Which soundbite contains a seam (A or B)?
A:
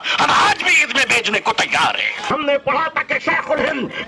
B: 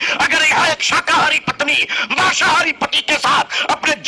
A